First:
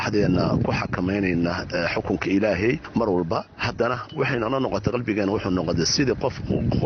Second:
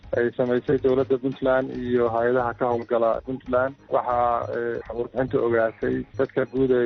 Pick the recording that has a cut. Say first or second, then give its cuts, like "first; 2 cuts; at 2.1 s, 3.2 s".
second; 1 cut; at 3.8 s